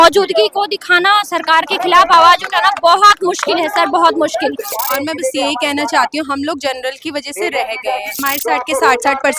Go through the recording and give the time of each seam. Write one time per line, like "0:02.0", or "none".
0:04.7
0:08.2

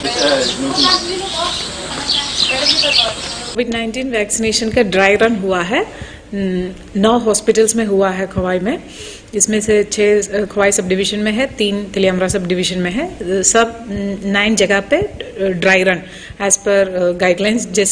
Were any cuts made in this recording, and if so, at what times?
none

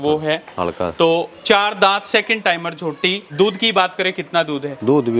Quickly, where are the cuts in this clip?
0:03.2

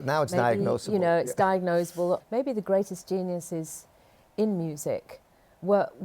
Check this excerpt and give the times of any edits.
0:02.2

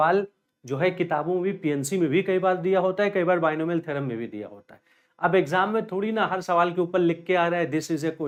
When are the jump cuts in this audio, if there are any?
none

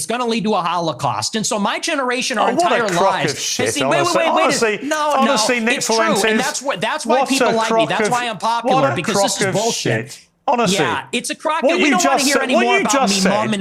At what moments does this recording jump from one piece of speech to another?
none

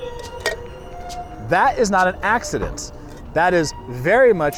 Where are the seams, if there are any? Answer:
none

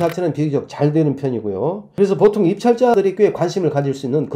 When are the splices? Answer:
0:01.8
0:02.9

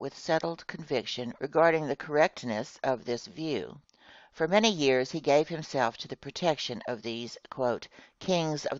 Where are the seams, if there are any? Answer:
0:05.5

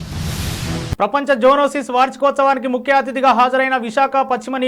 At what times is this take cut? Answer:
0:01.0

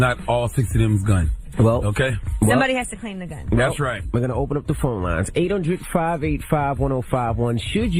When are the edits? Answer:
none

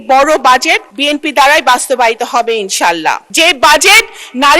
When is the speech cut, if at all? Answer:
0:03.3

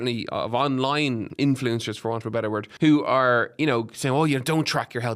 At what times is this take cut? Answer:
0:01.3
0:02.7

